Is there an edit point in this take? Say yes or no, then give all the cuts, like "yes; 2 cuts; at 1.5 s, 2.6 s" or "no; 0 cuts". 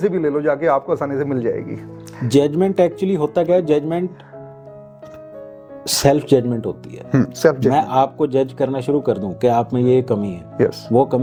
no; 0 cuts